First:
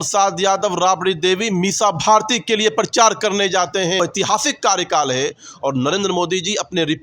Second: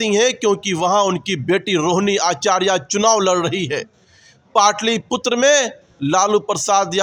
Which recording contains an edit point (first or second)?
first